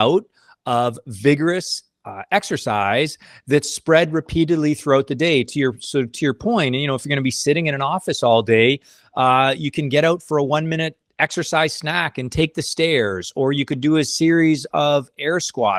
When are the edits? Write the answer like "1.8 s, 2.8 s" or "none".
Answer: none